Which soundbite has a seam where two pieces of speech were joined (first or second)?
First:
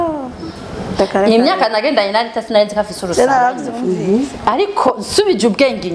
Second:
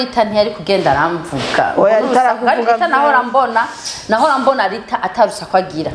first